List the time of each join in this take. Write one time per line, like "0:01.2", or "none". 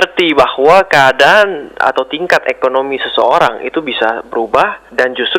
none